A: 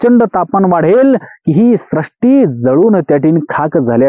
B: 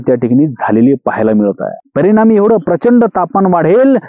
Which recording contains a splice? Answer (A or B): B